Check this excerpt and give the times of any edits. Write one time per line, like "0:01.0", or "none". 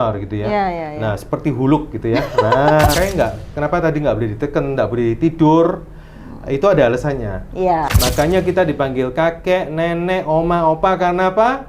0:02.9
0:07.9